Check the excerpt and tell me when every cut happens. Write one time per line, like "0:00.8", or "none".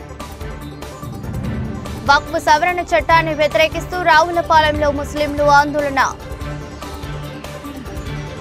none